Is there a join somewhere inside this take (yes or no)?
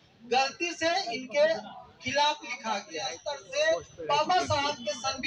yes